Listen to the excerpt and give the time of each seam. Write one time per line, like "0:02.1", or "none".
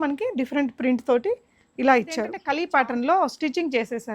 0:02.4